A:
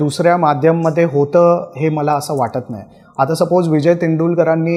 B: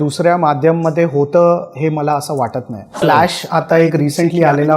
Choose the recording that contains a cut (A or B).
B